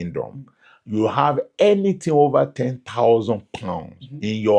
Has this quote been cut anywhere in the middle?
no; 0 cuts

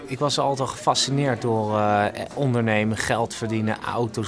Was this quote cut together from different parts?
no; 0 cuts

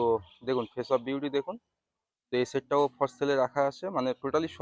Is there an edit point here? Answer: no; 0 cuts

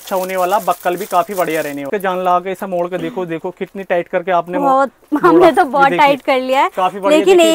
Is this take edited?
yes; 1 cut; at 1.9 s

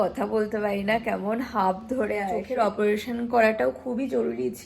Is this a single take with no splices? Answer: no; 1 cut; at 2.4 s

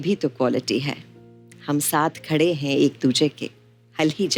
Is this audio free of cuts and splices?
yes; 0 cuts

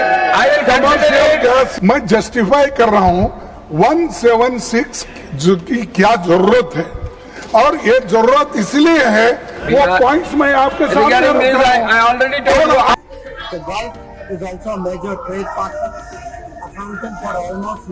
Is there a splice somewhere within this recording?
yes; 2 cuts; at 1.7 s, 12.9 s

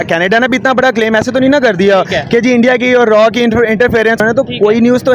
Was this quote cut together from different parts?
yes; 1 cut; at 4.2 s

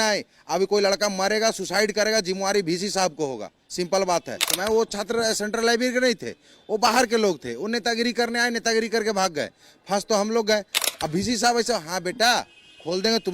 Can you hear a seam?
yes; 2 cuts; at 4.5 s, 10.8 s

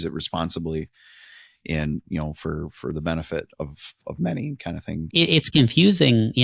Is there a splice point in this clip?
yes; 1 cut; at 5.3 s

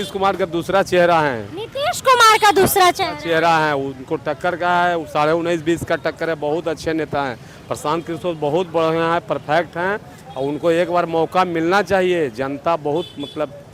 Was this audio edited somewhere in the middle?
no; 0 cuts

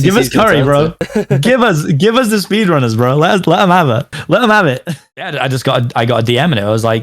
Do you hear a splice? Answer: yes; 1 cut; at 5.1 s

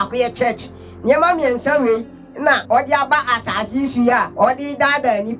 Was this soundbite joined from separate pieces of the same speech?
yes; 2 cuts; at 2.6 s, 4.3 s

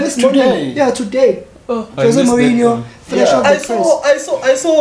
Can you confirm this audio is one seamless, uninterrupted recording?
yes; 0 cuts

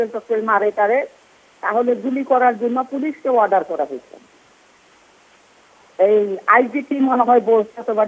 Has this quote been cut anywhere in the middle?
no; 0 cuts

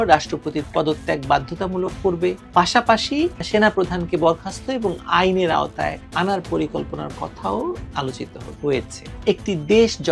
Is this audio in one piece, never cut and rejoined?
no; 2 cuts; at 2.4 s, 9.1 s

